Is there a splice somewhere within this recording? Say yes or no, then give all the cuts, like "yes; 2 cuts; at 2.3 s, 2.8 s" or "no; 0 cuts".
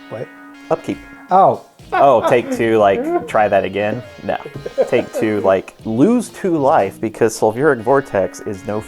yes; 2 cuts; at 1.9 s, 5.8 s